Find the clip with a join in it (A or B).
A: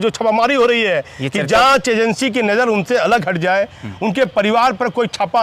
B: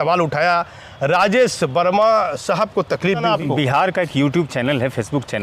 B